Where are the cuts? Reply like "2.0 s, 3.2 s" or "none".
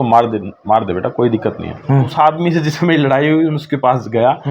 2.1 s